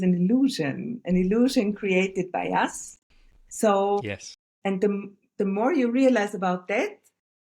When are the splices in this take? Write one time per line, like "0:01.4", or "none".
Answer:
none